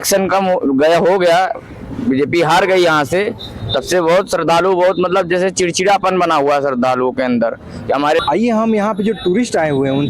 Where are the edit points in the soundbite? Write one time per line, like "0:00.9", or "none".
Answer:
0:08.2